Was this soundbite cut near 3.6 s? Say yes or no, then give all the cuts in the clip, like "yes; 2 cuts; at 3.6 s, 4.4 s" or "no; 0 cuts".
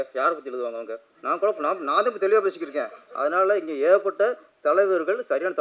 no; 1 cut; at 1.1 s